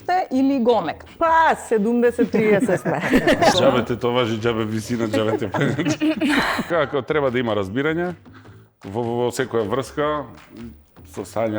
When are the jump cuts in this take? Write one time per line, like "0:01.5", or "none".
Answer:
0:01.0
0:03.6
0:06.8